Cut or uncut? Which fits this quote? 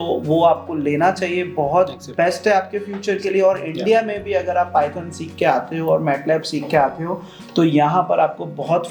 uncut